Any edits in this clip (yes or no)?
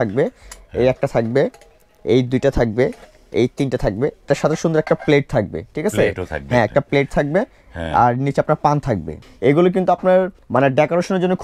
yes